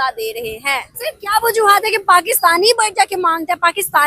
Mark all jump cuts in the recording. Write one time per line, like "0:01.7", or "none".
0:00.9